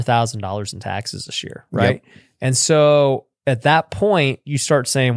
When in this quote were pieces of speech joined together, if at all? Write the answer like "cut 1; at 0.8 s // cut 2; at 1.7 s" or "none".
none